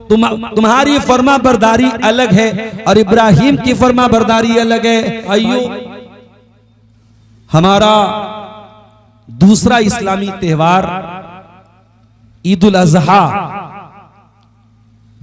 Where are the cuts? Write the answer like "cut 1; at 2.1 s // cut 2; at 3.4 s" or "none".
cut 1; at 5.2 s